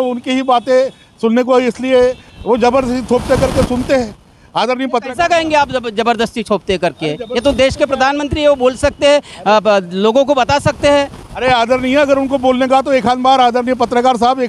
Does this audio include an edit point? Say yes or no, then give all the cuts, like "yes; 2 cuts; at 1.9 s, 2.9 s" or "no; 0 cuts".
no; 0 cuts